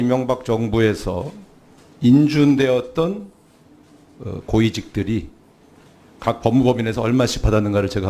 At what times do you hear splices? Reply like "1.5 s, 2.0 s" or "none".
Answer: 5.6 s